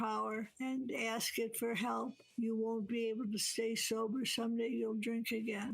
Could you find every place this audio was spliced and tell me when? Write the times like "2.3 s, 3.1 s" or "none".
2.2 s